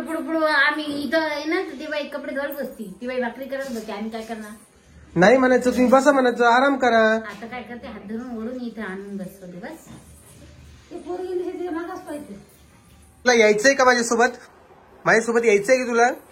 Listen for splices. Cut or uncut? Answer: cut